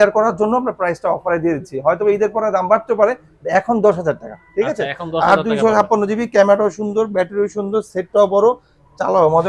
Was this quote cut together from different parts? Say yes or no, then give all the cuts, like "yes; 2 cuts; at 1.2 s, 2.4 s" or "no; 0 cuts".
no; 0 cuts